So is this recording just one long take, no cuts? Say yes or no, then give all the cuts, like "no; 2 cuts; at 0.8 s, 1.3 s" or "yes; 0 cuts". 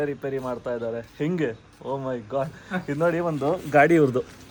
yes; 0 cuts